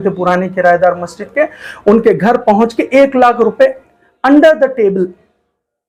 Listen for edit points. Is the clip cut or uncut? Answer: uncut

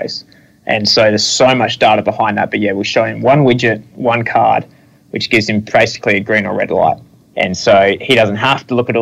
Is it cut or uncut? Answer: cut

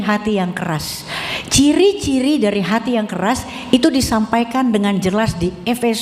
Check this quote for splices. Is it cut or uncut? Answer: uncut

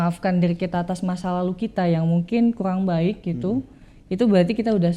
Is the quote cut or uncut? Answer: uncut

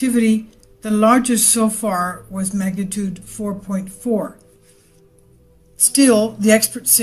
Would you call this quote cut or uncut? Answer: cut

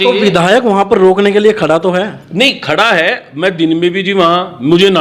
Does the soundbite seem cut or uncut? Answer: uncut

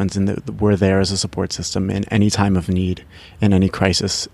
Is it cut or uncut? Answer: uncut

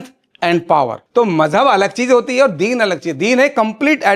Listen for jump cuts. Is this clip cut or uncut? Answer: cut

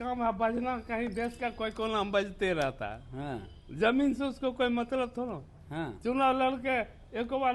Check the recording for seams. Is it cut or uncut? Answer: uncut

